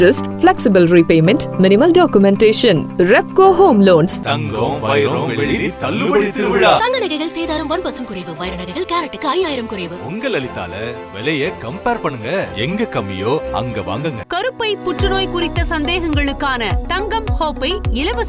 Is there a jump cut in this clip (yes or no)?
no